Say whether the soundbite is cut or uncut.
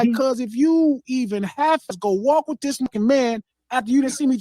cut